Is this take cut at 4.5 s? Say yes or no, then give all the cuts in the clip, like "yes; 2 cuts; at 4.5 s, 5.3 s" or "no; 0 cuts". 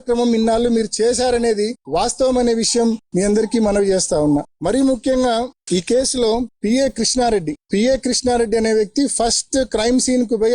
no; 0 cuts